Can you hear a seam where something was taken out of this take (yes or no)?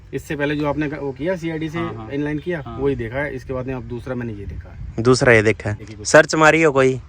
yes